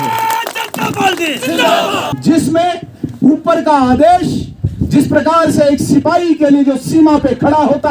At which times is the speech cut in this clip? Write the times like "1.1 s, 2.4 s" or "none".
2.1 s